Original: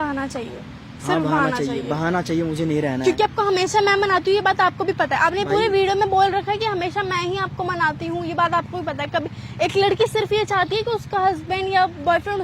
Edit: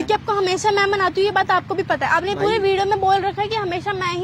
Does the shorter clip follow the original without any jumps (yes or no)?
yes